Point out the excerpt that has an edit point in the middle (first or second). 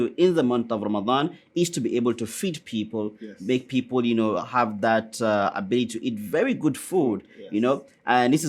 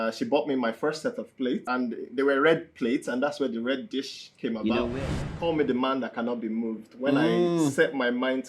second